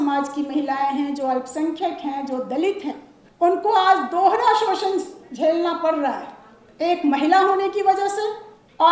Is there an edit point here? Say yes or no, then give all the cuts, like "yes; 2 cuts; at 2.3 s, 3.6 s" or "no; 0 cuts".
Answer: no; 0 cuts